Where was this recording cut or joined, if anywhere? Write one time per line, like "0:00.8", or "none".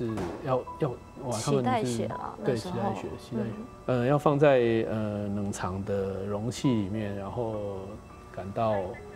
0:01.1
0:03.7